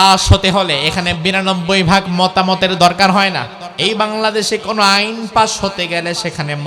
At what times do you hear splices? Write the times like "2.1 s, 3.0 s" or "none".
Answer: 3.6 s